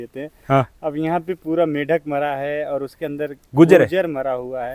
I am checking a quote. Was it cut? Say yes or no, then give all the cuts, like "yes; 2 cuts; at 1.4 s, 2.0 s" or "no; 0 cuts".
no; 0 cuts